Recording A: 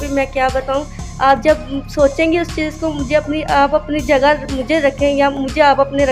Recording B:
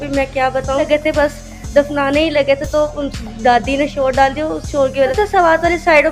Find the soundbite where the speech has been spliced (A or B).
B